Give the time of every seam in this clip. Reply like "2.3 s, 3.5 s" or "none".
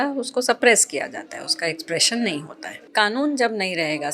2.9 s